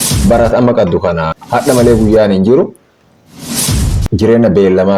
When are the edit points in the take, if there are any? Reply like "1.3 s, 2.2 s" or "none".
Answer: 1.3 s